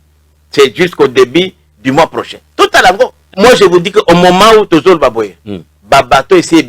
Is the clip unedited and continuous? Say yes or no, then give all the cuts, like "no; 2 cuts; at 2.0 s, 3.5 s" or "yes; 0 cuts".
no; 1 cut; at 3.2 s